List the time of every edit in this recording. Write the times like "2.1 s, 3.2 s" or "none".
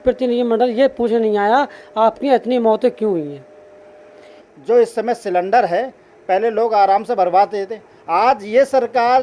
4.3 s